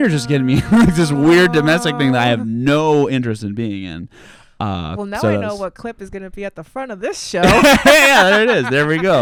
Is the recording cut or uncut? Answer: uncut